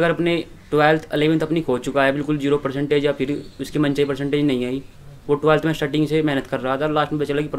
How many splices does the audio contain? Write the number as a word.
zero